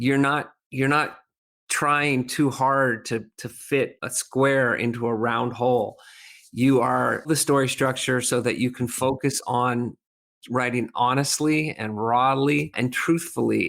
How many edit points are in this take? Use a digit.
2